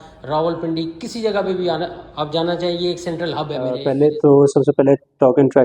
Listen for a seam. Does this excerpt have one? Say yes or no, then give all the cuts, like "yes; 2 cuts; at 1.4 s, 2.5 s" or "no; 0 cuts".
yes; 1 cut; at 3.8 s